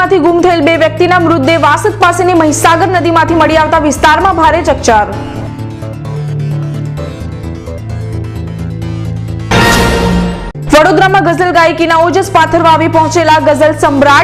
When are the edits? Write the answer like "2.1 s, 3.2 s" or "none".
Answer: none